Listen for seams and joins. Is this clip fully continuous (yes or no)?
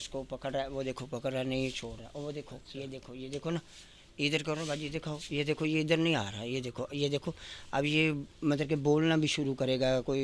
yes